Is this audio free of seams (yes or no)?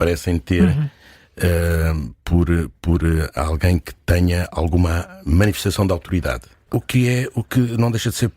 no